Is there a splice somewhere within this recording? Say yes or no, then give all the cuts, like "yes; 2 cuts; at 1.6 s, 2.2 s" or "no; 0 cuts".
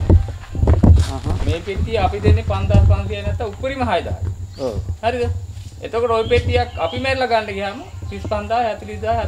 no; 0 cuts